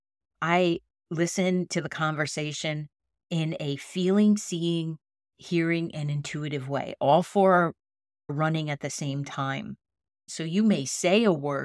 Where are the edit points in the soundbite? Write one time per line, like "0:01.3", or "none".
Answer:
0:10.2